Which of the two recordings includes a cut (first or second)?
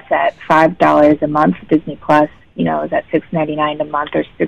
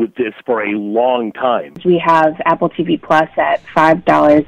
second